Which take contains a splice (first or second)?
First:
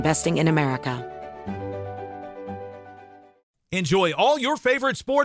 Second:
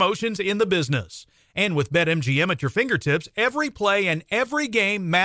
first